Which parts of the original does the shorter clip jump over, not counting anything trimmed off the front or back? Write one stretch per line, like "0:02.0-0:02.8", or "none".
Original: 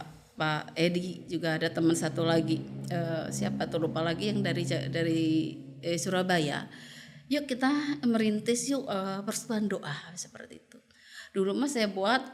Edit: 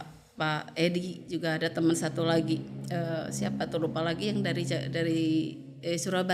none